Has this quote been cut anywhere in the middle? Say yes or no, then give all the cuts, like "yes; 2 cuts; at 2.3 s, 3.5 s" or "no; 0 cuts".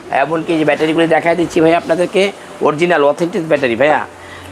no; 0 cuts